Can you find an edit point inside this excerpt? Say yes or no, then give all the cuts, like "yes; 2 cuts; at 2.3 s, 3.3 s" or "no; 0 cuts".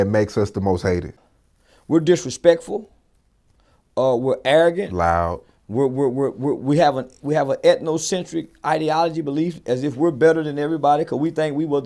yes; 1 cut; at 1.1 s